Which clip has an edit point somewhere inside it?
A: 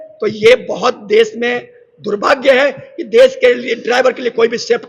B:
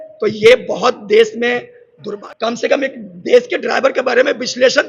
B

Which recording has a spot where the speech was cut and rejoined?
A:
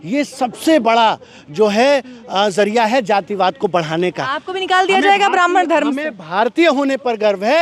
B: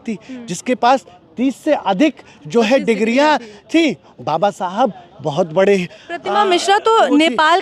B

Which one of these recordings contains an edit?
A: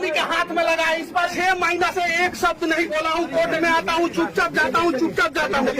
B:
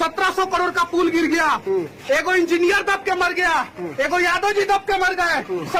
A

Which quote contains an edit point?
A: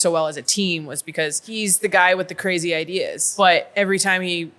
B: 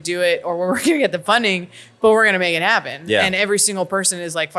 A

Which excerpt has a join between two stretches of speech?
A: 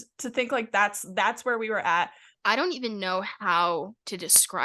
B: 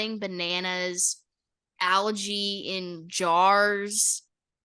A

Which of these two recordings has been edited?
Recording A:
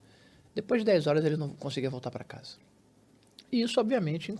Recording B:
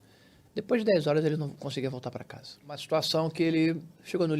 B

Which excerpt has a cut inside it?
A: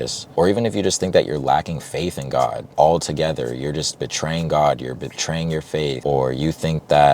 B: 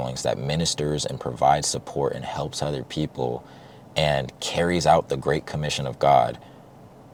A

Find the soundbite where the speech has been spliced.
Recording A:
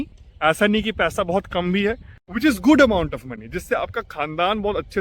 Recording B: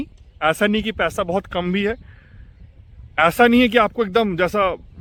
A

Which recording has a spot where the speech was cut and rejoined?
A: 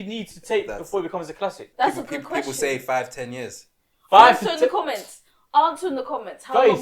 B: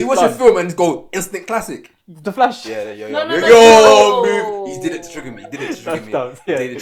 A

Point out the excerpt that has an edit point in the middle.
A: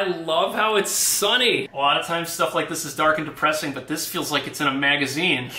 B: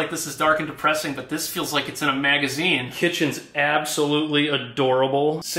A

